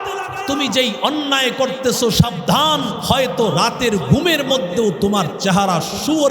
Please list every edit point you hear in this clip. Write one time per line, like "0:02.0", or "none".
0:03.0